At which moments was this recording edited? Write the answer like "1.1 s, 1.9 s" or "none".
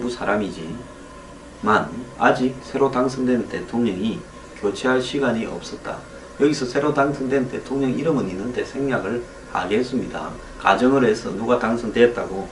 3.3 s